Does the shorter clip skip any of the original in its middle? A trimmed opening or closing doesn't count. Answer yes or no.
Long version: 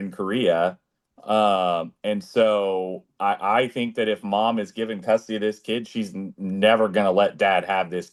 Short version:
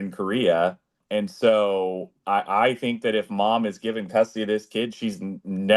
yes